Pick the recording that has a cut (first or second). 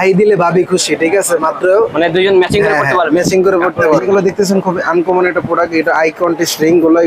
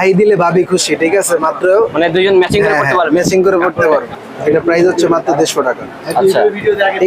first